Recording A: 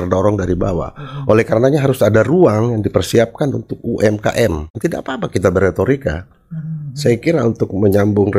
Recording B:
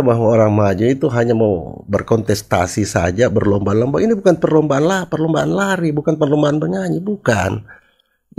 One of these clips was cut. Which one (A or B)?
A